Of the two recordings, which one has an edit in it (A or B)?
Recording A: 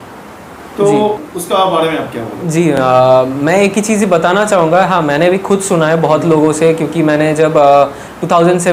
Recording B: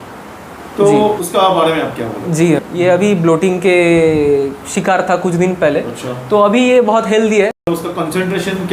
B